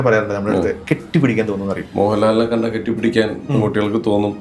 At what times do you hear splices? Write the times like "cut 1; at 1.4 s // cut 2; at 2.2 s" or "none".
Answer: cut 1; at 0.8 s // cut 2; at 1.9 s